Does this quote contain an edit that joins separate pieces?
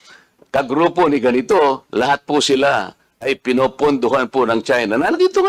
no; 0 cuts

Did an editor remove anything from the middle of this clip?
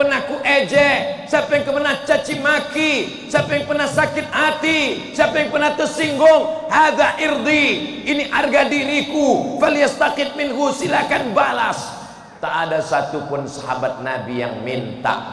no; 0 cuts

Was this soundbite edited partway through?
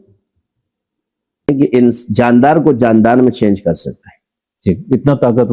yes; 1 cut; at 1.5 s

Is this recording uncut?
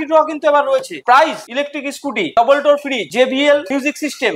no; 1 cut; at 1.0 s

